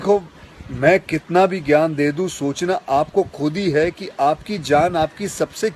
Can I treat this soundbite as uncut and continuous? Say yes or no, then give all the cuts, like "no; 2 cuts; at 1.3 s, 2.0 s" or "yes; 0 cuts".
yes; 0 cuts